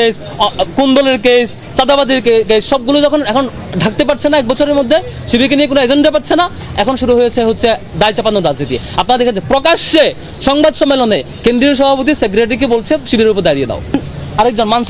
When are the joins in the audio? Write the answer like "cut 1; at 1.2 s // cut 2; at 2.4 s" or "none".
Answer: cut 1; at 14.0 s